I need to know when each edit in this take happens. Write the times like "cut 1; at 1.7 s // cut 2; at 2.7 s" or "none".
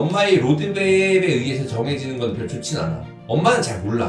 none